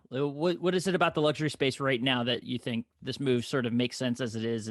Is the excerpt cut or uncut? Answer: uncut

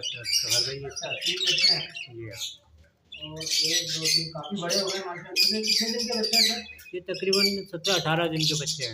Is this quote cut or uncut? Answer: uncut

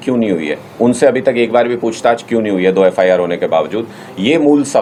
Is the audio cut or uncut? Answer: uncut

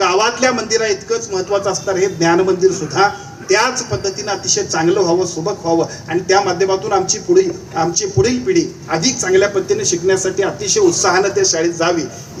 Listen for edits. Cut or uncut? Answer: uncut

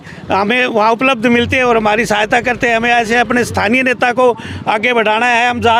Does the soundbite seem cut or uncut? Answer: uncut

